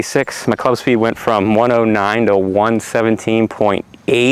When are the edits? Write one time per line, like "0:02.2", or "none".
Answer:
none